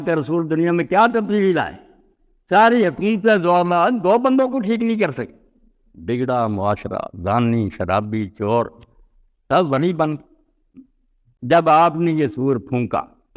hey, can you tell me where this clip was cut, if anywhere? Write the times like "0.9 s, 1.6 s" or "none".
11.3 s